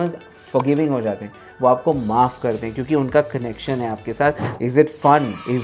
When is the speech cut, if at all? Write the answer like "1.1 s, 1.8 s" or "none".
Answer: 4.5 s